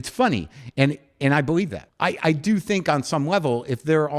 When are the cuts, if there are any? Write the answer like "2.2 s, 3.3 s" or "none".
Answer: 1.8 s